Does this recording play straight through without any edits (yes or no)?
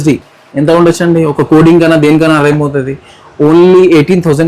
yes